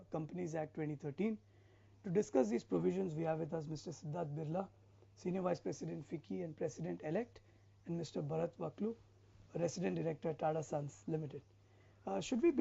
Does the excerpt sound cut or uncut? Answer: cut